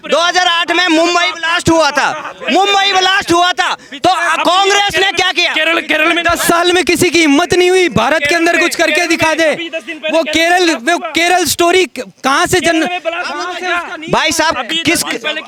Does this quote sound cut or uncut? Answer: uncut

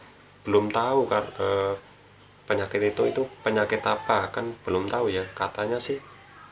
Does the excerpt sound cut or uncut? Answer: uncut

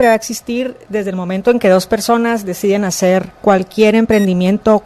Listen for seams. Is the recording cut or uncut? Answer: cut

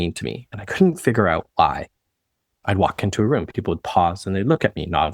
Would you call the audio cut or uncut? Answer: cut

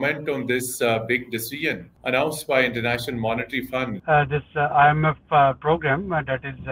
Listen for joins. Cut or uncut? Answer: cut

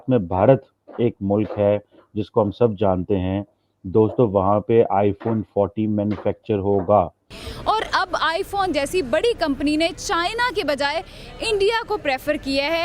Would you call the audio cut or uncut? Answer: cut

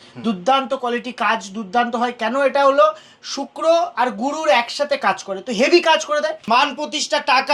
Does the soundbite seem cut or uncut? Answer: cut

